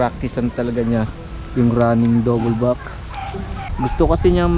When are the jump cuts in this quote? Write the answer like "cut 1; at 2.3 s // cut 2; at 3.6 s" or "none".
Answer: none